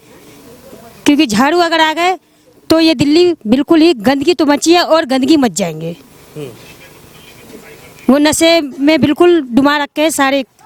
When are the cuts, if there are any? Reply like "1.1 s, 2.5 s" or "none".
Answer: none